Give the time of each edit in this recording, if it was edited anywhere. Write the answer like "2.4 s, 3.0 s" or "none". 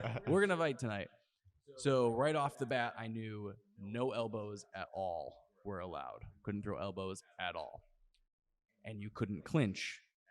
none